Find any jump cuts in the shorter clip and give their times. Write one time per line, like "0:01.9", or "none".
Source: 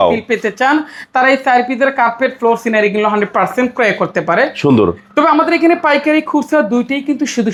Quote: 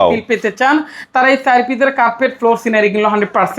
none